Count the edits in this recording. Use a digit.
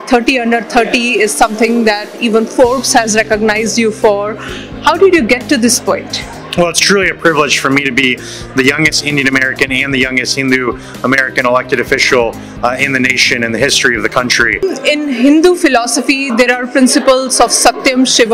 1